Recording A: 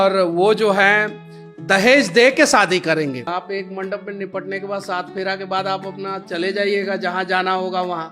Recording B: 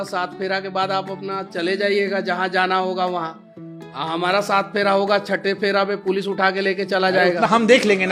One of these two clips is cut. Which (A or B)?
A